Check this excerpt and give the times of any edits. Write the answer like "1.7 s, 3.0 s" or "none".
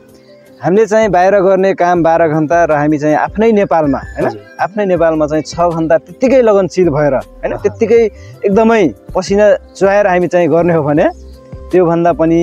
none